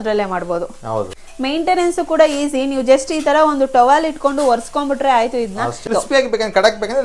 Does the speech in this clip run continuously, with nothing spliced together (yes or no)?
no